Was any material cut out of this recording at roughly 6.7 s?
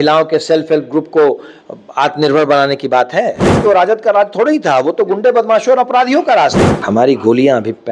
yes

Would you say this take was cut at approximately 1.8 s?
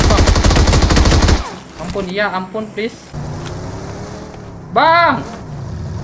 no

